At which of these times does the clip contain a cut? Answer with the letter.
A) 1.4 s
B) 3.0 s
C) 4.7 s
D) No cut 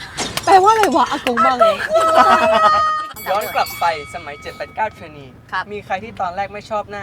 B